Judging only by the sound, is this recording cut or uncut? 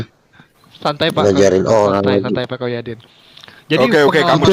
uncut